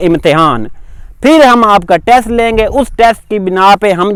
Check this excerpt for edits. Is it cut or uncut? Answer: uncut